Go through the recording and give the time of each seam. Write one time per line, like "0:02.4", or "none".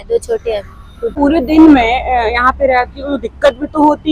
0:01.1